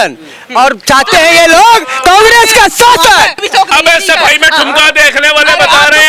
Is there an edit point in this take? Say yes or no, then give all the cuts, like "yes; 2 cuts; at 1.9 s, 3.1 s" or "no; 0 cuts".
yes; 1 cut; at 3.4 s